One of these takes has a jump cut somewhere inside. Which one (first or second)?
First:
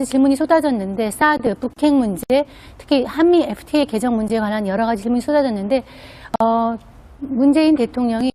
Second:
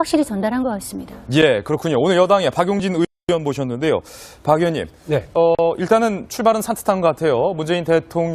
first